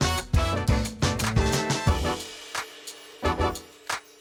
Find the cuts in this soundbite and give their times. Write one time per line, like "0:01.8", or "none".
none